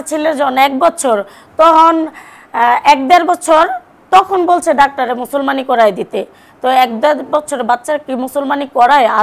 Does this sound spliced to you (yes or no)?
no